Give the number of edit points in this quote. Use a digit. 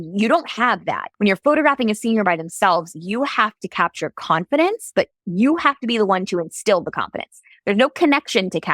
1